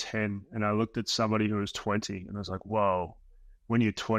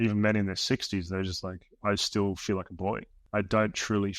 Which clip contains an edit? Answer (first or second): second